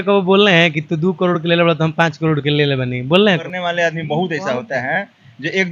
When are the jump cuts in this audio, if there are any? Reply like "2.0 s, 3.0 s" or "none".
3.5 s